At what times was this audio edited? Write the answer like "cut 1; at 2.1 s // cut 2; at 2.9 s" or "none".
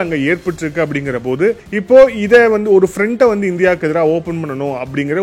cut 1; at 1.7 s